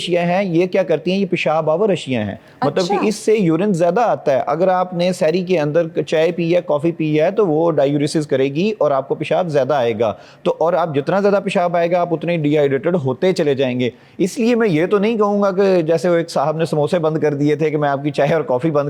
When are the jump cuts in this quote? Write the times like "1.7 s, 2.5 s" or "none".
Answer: none